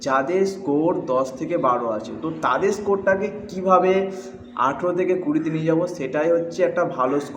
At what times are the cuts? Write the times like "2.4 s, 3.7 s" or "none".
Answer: none

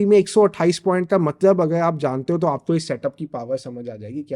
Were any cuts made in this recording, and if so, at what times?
none

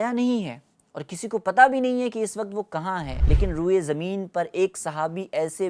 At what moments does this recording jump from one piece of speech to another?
3.2 s

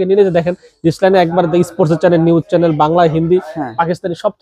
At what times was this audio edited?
none

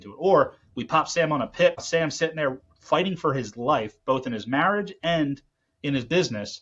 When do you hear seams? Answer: 1.8 s

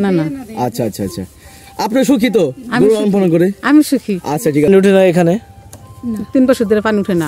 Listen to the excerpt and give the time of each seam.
4.6 s

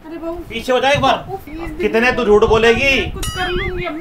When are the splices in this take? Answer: 1.4 s

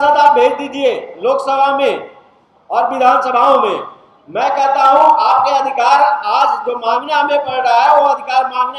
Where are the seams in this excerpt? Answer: none

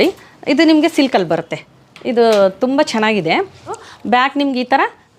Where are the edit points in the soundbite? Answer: 3.8 s

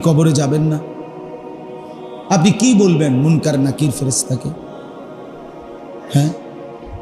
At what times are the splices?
0.8 s, 2.3 s

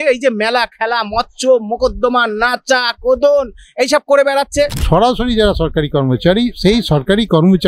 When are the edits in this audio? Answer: 4.8 s

